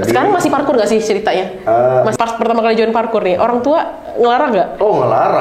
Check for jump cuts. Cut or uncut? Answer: cut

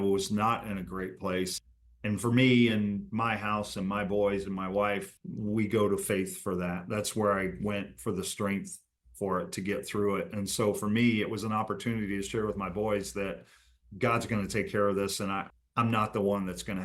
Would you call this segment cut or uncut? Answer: cut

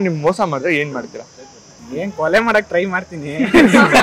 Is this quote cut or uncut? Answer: uncut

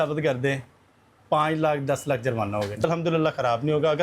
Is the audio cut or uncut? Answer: cut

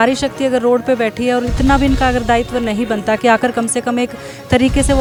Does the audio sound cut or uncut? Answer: uncut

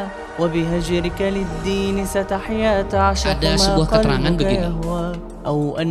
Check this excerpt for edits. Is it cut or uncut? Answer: uncut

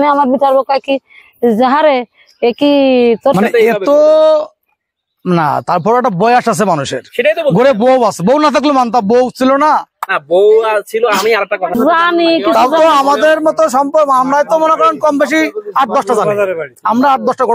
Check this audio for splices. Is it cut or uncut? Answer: cut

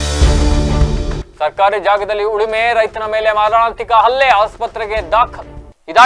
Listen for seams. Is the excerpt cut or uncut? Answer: uncut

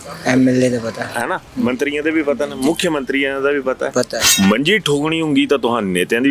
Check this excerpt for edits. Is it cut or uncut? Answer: cut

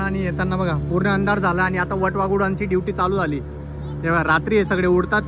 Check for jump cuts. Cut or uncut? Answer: uncut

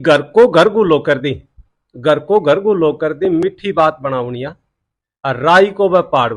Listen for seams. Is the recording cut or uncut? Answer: uncut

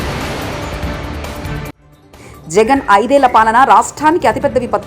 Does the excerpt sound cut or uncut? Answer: cut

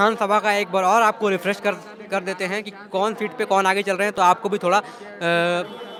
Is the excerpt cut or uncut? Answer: uncut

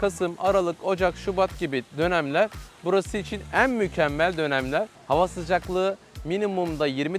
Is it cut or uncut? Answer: cut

